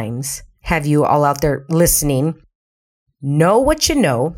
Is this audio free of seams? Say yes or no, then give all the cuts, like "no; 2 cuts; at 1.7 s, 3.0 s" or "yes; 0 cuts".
yes; 0 cuts